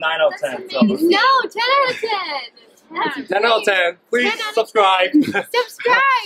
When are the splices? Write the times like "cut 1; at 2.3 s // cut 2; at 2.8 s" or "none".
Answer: none

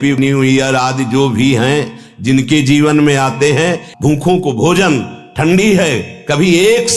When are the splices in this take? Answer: cut 1; at 3.8 s

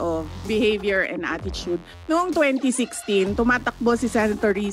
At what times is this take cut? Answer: cut 1; at 1.9 s

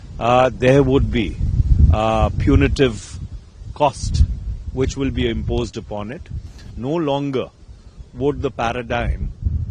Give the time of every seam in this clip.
cut 1; at 6.6 s

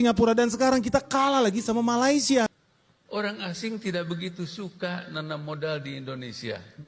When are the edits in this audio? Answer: cut 1; at 2.5 s

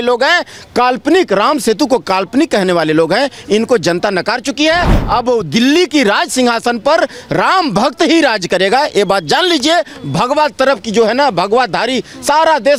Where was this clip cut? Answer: none

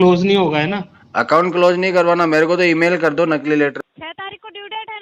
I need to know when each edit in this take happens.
cut 1; at 3.8 s

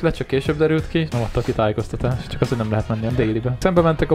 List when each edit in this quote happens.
cut 1; at 1.1 s // cut 2; at 2.2 s // cut 3; at 3.1 s

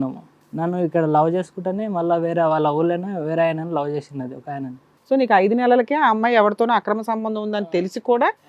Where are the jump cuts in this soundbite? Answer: cut 1; at 4.8 s

